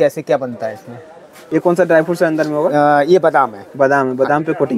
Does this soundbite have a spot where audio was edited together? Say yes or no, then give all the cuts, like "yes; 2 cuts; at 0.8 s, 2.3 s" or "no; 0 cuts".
yes; 1 cut; at 1.3 s